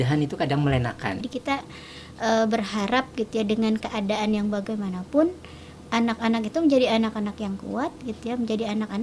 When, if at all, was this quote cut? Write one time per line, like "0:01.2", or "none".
0:01.2